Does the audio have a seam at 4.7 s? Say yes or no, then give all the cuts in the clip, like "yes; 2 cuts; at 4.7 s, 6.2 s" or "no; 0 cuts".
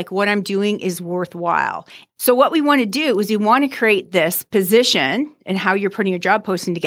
no; 1 cut; at 2.0 s